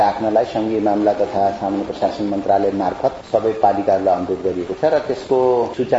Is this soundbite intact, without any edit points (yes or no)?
yes